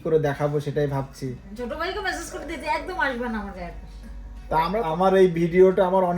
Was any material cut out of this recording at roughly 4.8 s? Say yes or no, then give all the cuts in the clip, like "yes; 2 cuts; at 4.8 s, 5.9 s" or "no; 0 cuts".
yes; 1 cut; at 4.8 s